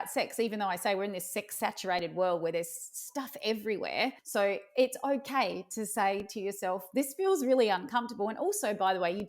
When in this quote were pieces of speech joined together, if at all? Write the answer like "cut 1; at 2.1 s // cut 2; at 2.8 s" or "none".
cut 1; at 4.2 s